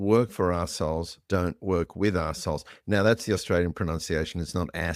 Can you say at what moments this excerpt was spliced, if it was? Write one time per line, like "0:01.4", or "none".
none

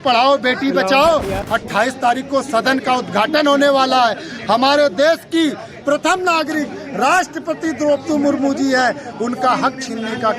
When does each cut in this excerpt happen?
0:01.4

